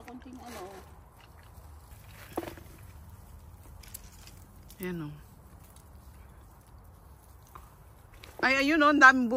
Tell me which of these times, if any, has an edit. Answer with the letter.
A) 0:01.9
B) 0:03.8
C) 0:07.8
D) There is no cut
A